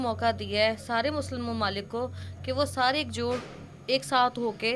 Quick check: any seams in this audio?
no; 0 cuts

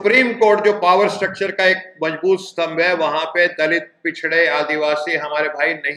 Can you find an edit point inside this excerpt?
no; 0 cuts

